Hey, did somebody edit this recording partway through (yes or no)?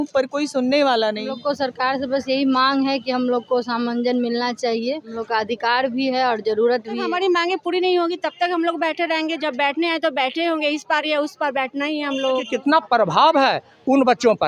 yes